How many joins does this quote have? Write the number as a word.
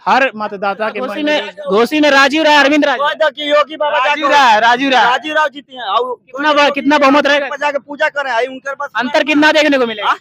one